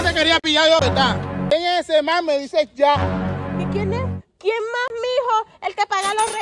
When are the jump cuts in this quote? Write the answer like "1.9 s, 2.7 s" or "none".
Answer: 1.3 s